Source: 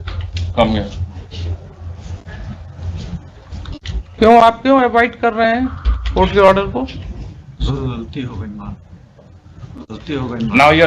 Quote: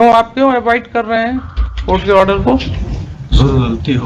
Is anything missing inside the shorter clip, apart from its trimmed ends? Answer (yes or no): no